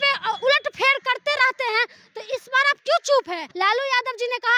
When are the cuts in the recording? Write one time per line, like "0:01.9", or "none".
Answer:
0:03.4

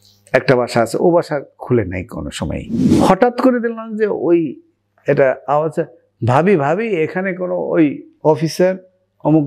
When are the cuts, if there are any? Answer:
0:02.8

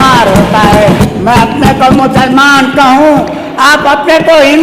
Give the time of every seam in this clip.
0:01.0

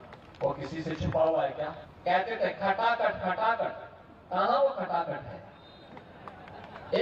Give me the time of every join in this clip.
0:01.8

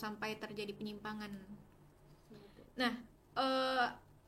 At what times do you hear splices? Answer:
none

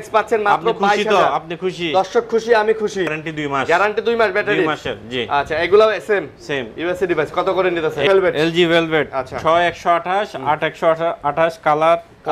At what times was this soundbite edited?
0:03.2
0:08.1

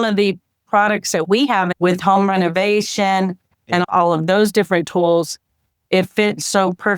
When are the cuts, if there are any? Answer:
0:01.7

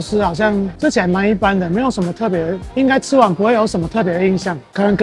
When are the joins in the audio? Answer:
none

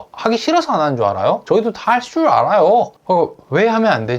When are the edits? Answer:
0:01.4
0:03.0

